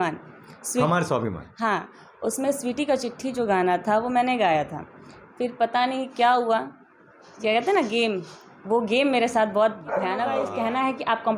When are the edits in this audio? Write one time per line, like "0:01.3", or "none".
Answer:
0:10.4